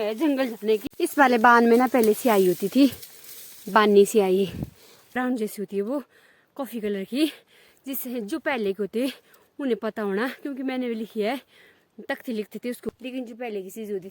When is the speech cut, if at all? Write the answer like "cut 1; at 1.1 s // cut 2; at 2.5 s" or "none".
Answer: cut 1; at 0.8 s // cut 2; at 5.1 s // cut 3; at 12.9 s